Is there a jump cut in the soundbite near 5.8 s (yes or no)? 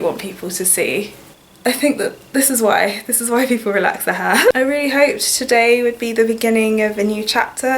no